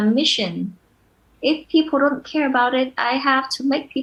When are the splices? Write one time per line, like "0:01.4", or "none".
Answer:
none